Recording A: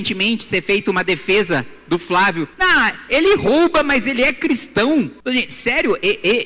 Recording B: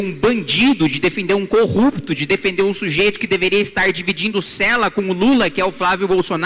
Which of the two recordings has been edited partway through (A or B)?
A